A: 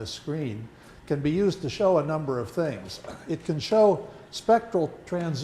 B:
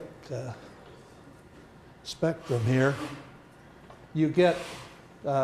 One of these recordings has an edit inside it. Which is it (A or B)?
A